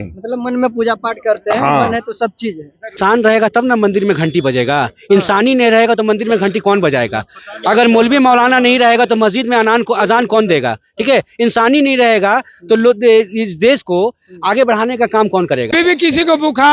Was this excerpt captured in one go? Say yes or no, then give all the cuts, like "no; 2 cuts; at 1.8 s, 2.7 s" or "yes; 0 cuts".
no; 2 cuts; at 3.0 s, 15.7 s